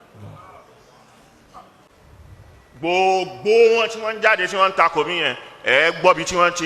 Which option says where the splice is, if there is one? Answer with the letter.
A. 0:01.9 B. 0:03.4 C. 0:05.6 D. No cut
A